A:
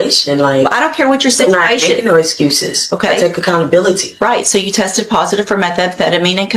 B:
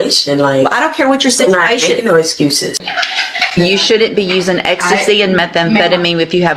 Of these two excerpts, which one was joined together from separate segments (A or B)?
B